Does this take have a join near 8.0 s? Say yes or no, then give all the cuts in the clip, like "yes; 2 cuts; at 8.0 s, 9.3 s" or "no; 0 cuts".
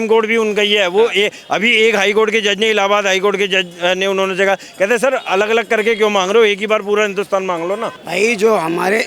yes; 1 cut; at 8.0 s